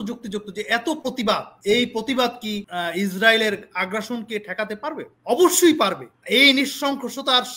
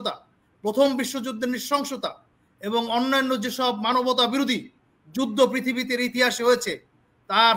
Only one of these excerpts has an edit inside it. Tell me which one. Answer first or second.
first